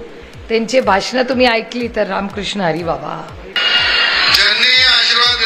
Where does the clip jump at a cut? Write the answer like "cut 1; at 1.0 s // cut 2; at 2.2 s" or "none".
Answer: cut 1; at 3.5 s